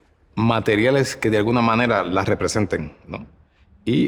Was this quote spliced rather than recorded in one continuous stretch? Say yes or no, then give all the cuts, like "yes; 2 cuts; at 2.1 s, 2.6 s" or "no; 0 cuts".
no; 0 cuts